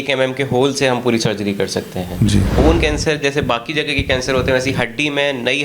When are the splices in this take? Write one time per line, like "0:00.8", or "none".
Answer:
0:02.5

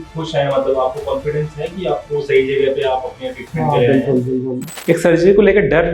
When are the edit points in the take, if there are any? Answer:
0:04.7

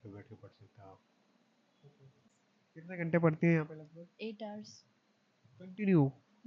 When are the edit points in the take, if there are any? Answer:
0:02.2

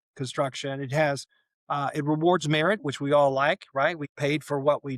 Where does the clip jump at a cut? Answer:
0:04.0

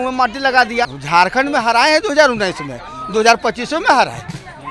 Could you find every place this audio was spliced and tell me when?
0:01.0

